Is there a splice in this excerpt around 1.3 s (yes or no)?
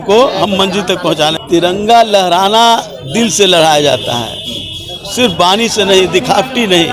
yes